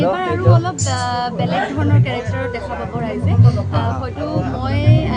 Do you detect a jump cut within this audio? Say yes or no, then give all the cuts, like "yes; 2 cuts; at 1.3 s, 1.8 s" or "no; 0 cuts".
no; 0 cuts